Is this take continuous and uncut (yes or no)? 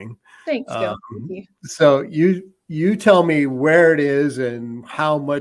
yes